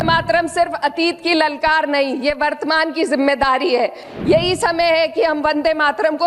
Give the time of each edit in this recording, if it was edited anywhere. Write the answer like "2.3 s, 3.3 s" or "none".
4.1 s